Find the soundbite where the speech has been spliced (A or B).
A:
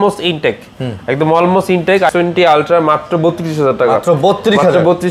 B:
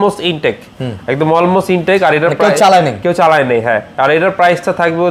A